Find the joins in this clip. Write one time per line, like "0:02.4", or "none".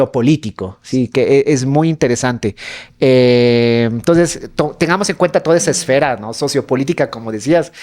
none